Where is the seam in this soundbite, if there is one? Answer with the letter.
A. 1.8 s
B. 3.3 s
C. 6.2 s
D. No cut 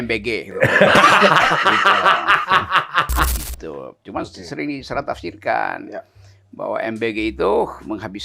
B